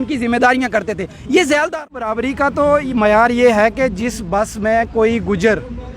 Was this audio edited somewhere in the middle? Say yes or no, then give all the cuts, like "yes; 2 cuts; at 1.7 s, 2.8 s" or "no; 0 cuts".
yes; 1 cut; at 1.7 s